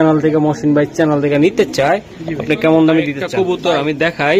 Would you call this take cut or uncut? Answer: cut